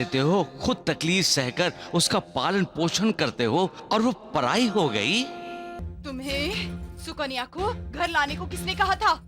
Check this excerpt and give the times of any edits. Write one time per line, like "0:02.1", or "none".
0:05.8